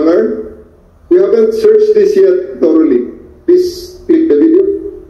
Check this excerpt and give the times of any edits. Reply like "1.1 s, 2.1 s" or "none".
none